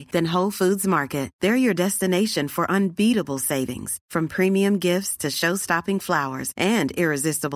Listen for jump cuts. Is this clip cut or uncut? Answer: uncut